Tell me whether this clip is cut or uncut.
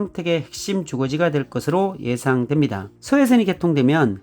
cut